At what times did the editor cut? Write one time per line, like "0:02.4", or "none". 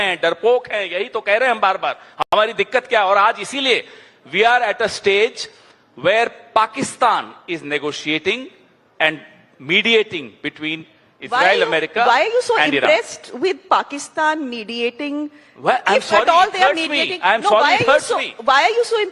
none